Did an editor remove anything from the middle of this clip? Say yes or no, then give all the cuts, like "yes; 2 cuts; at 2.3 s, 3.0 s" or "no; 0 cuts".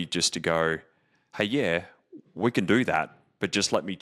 no; 0 cuts